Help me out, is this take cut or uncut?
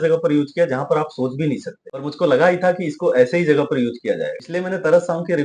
uncut